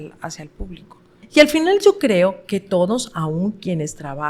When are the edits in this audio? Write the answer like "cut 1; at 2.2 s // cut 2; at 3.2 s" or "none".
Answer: cut 1; at 1.2 s

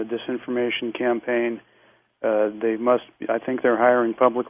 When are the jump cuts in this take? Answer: cut 1; at 3.6 s

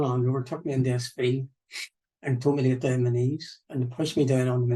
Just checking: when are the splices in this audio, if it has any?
none

